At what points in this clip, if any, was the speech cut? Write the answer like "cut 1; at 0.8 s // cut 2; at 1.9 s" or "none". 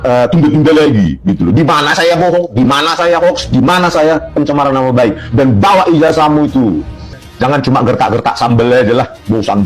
cut 1; at 7.2 s